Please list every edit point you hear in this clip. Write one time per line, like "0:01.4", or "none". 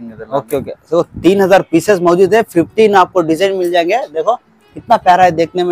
none